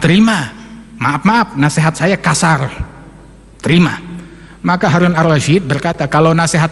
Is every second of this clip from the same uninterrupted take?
yes; 0 cuts

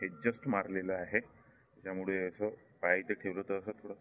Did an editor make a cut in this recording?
no; 0 cuts

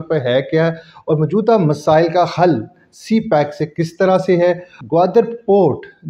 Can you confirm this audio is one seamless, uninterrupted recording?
no; 1 cut; at 4.7 s

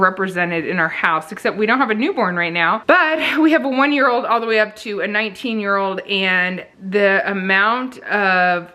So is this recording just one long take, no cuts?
yes; 0 cuts

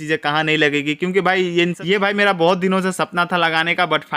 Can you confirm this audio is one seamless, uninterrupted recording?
no; 1 cut; at 1.8 s

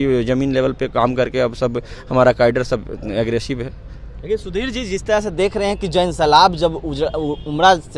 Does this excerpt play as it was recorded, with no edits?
yes; 0 cuts

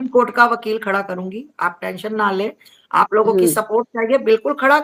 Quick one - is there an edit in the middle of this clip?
no; 0 cuts

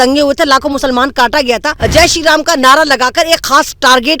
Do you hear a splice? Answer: yes; 1 cut; at 1.7 s

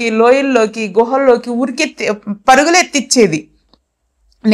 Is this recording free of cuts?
yes; 0 cuts

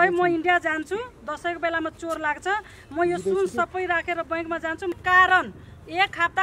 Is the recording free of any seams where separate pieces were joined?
no; 1 cut; at 4.9 s

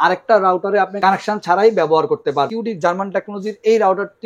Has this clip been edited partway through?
yes; 2 cuts; at 0.9 s, 2.5 s

